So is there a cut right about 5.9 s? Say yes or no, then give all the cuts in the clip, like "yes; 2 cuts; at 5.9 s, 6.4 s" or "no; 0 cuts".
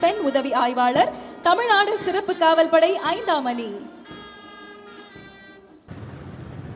yes; 1 cut; at 5.9 s